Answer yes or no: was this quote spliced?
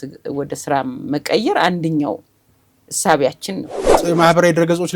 yes